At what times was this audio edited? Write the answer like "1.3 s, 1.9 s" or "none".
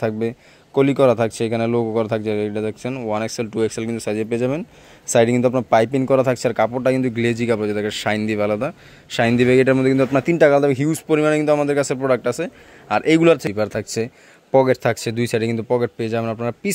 13.4 s